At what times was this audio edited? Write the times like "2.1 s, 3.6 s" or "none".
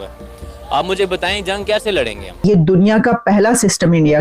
2.4 s